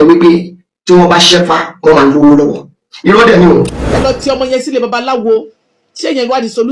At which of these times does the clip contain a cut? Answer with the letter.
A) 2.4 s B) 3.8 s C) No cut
B